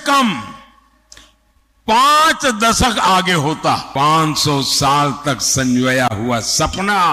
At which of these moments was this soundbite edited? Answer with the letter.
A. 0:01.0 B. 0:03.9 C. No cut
B